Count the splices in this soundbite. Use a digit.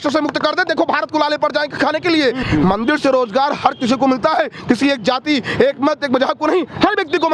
1